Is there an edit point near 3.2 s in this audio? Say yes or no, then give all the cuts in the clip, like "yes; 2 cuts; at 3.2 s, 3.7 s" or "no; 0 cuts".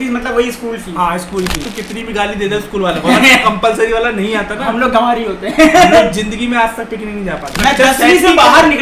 no; 2 cuts; at 1.7 s, 7.5 s